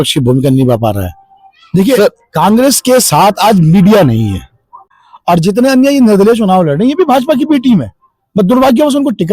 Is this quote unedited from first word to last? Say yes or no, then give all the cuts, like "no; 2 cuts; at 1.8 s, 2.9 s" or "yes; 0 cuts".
no; 1 cut; at 5.1 s